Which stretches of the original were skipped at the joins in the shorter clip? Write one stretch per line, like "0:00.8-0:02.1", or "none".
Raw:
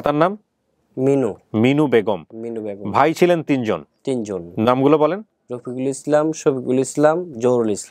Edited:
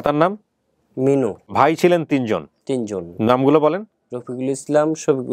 0:01.4-0:02.8